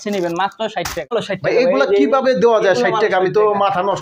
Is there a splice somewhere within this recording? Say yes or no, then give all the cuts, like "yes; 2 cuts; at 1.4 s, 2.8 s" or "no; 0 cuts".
yes; 1 cut; at 1.1 s